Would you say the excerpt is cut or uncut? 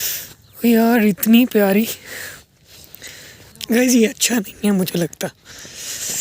cut